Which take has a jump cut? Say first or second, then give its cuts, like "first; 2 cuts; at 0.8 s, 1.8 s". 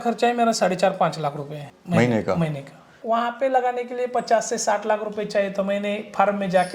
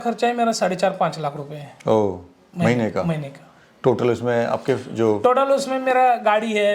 first; 2 cuts; at 1.6 s, 3.0 s